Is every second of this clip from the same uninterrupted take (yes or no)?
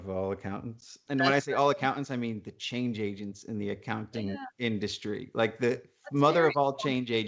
yes